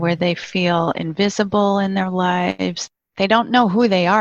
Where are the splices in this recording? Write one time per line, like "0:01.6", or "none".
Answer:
0:02.8